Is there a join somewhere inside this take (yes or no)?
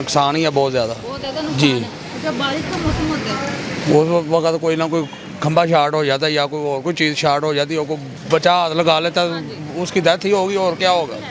no